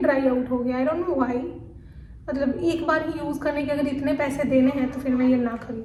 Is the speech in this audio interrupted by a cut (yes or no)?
no